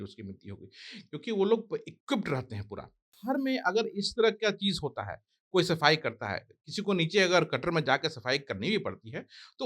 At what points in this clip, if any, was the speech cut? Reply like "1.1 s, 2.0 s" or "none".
3.2 s